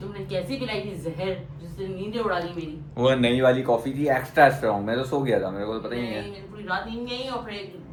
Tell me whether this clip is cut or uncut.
uncut